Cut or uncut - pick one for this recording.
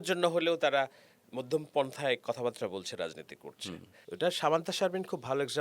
cut